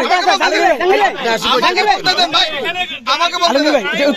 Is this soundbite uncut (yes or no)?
yes